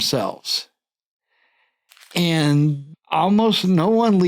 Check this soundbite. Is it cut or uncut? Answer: cut